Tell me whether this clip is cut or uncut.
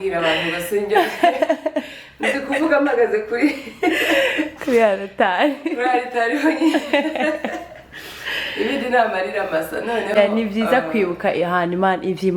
uncut